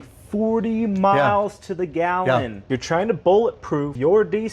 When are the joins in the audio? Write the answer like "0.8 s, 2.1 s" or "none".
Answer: 2.7 s